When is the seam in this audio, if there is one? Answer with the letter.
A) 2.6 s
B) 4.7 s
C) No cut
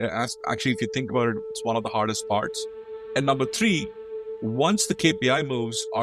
A